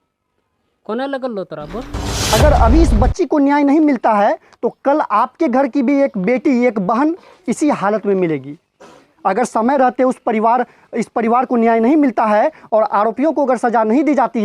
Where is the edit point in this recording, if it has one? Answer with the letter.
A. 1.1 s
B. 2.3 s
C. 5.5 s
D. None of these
B